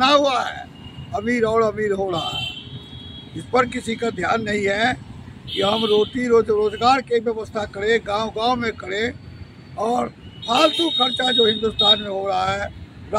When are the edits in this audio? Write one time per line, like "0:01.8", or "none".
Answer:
none